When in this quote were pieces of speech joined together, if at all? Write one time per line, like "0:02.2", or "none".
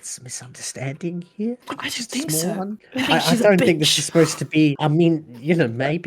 0:01.7
0:02.8
0:04.8

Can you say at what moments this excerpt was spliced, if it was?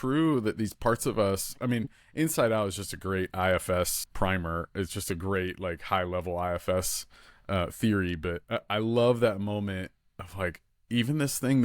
0:04.0

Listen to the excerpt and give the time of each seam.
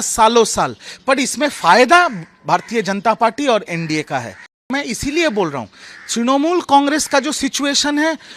0:04.7

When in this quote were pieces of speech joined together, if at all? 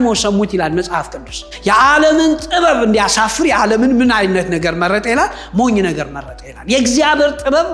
0:01.5

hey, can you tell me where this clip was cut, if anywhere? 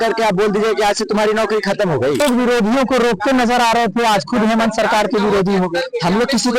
0:02.2

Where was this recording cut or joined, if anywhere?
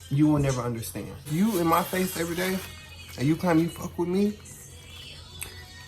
0:01.3

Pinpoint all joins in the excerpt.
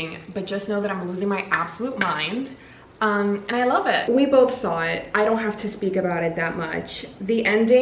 0:04.1

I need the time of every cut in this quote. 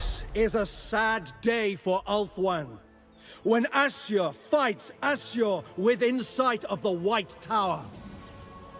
0:07.8

